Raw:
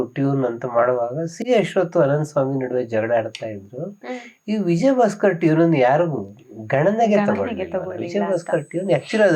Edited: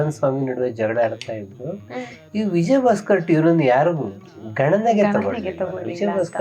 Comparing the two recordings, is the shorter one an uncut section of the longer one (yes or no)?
yes